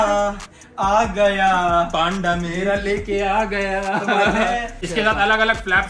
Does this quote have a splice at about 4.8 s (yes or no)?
yes